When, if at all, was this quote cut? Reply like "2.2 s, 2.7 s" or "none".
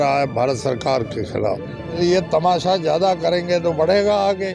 2.0 s